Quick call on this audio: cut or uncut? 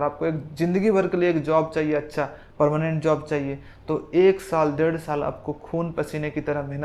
uncut